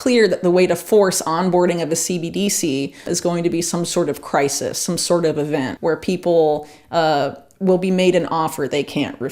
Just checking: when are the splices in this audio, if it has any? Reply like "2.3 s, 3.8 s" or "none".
5.7 s